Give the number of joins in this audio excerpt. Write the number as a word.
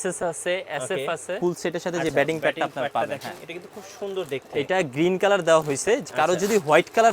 one